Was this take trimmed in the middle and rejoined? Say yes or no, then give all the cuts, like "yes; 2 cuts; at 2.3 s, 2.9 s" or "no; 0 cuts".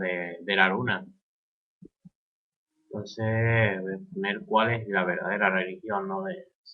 yes; 1 cut; at 4.7 s